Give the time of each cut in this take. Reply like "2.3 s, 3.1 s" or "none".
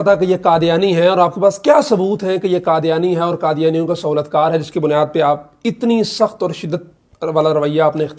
none